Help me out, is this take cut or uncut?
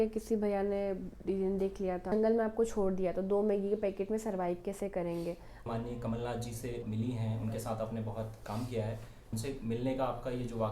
cut